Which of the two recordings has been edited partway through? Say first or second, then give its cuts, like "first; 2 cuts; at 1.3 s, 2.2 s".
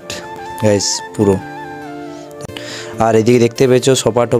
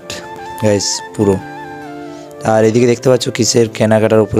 first; 1 cut; at 2.4 s